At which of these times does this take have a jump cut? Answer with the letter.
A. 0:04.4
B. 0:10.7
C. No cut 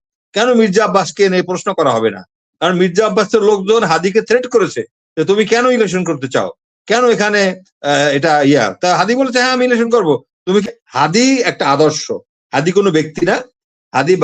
B